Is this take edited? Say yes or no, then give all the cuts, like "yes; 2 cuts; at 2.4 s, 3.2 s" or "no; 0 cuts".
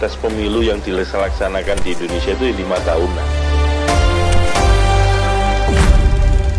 no; 0 cuts